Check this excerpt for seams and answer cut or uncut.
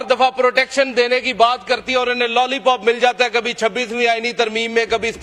uncut